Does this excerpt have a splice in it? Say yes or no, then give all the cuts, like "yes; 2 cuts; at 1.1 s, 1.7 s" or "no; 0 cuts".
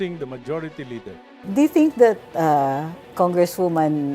yes; 1 cut; at 1.5 s